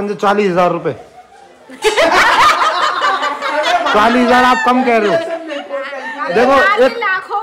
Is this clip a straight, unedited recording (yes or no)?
yes